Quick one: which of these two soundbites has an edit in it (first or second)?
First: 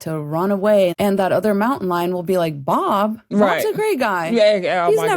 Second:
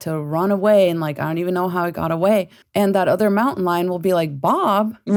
first